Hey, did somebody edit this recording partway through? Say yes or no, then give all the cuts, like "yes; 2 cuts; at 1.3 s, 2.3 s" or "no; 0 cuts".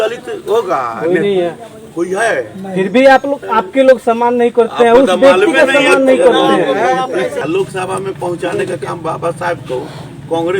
yes; 1 cut; at 7.4 s